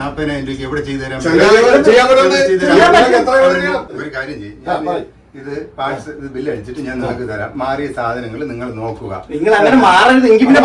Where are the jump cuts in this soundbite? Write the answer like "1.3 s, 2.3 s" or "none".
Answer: 3.9 s